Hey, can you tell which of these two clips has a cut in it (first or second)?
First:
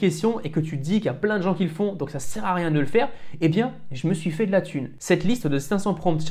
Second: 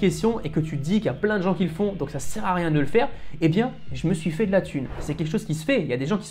second